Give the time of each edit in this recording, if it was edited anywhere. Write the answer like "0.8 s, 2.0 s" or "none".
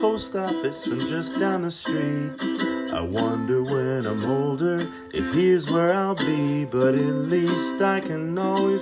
none